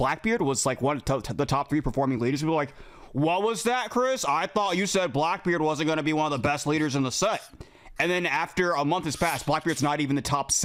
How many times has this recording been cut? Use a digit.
0